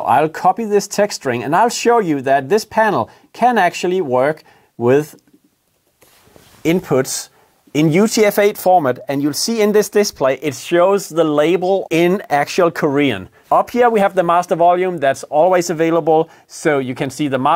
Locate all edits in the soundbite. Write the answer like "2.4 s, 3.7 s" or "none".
11.8 s, 13.3 s